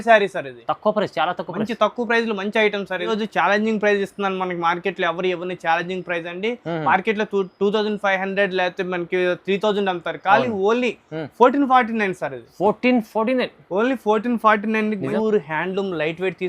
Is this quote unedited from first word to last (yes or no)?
no